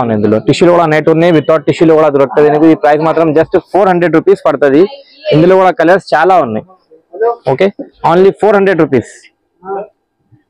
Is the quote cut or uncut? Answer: uncut